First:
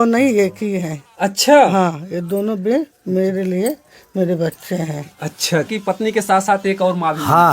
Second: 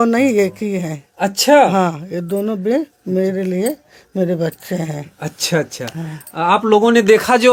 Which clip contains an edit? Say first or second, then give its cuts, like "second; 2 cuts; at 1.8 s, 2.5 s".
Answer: first; 1 cut; at 5.7 s